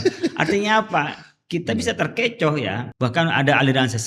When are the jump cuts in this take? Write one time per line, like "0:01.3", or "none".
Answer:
0:02.9